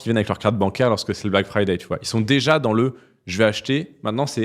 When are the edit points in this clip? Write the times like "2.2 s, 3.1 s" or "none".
none